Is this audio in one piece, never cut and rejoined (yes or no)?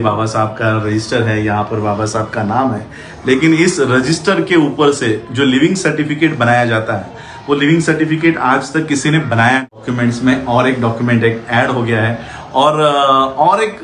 no